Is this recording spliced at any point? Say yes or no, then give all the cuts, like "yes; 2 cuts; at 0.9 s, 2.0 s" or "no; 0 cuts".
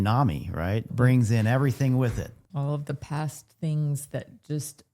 yes; 2 cuts; at 0.9 s, 2.4 s